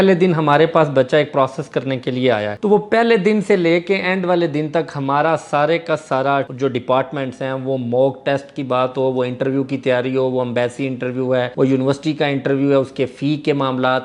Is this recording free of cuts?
no; 1 cut; at 6.5 s

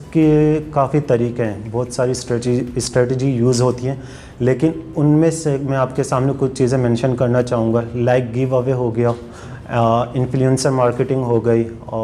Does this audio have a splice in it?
no; 0 cuts

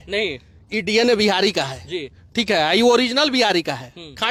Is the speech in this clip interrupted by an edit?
no; 0 cuts

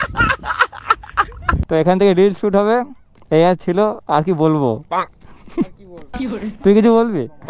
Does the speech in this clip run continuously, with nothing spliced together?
no; 1 cut; at 1.5 s

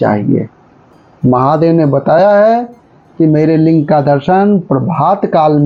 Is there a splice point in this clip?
no; 0 cuts

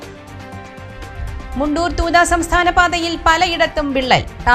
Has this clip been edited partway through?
yes; 1 cut; at 0.9 s

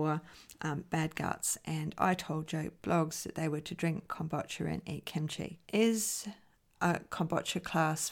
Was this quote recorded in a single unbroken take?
no; 1 cut; at 5.6 s

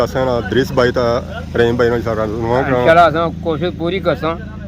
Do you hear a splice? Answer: no; 0 cuts

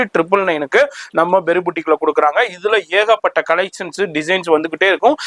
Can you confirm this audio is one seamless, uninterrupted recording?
yes; 0 cuts

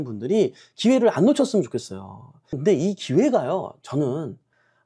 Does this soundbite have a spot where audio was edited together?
yes; 1 cut; at 2.6 s

